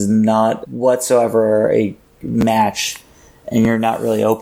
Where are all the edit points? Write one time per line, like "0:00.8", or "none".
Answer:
none